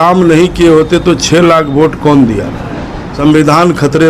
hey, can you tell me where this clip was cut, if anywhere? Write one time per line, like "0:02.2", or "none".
0:03.0